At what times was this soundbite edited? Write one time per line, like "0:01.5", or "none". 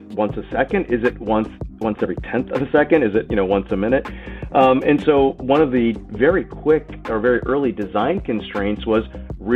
none